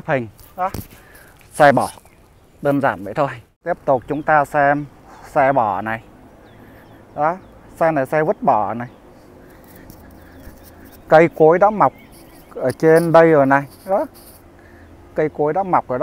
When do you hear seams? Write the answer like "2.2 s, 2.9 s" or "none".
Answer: 3.5 s